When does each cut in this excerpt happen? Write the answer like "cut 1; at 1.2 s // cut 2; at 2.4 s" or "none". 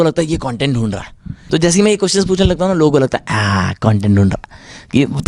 cut 1; at 1.4 s